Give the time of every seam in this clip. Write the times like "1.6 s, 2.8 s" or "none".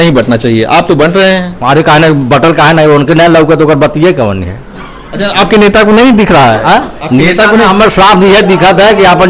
none